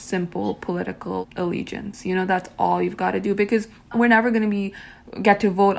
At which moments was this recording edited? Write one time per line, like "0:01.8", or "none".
0:01.2
0:03.9